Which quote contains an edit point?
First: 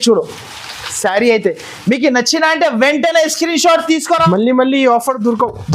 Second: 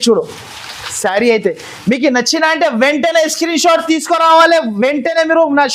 first; 1 cut; at 4.2 s

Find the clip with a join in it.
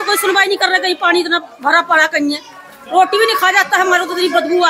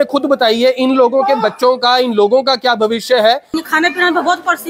second; 1 cut; at 3.5 s

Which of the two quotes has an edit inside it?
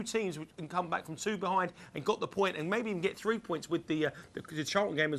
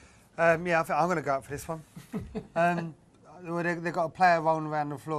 second; 1 cut; at 2.4 s

